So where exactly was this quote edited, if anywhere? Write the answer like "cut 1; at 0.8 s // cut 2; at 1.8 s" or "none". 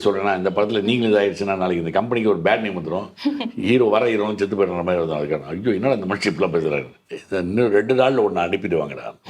cut 1; at 7.0 s